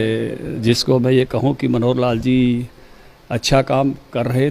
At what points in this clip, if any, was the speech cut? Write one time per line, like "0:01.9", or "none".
none